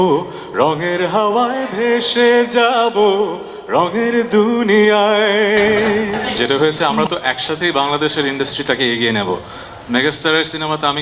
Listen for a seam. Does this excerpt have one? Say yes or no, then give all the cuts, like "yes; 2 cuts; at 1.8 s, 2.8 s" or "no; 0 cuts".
yes; 1 cut; at 6.2 s